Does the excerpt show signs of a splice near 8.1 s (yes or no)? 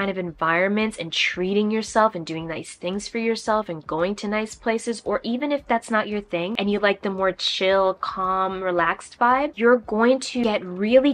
no